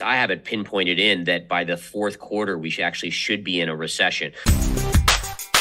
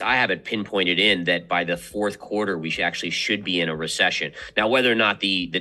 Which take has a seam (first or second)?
first